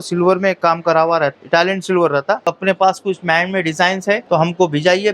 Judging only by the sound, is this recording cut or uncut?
cut